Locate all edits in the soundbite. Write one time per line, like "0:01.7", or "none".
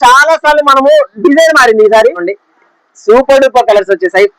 0:02.3